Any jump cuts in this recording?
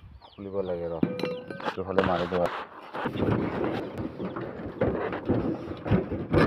yes; 1 cut; at 2.3 s

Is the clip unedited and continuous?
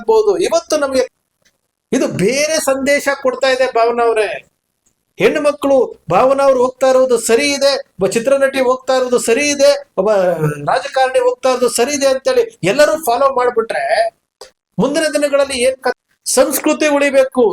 no; 2 cuts; at 1.1 s, 16.0 s

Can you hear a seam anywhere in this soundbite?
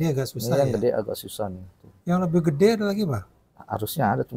no; 0 cuts

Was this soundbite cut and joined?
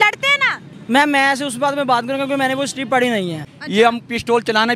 yes; 1 cut; at 3.4 s

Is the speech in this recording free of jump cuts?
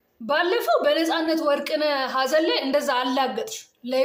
yes; 0 cuts

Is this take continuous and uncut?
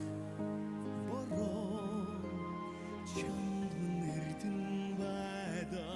yes; 0 cuts

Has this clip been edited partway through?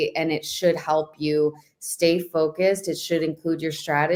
no; 0 cuts

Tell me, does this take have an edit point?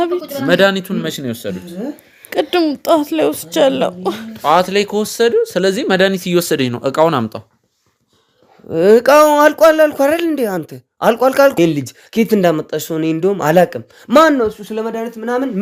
yes; 1 cut; at 11.5 s

